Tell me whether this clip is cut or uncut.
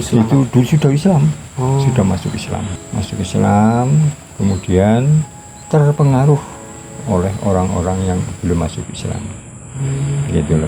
uncut